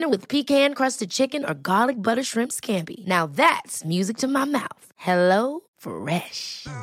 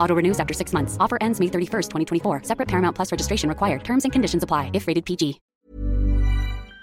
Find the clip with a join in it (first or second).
second